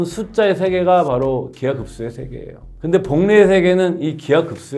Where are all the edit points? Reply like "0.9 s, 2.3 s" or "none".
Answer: none